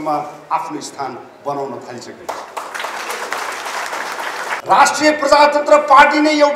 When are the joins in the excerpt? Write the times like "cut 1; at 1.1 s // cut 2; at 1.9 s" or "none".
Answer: cut 1; at 4.6 s